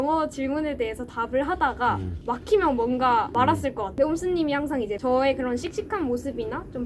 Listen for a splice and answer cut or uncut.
cut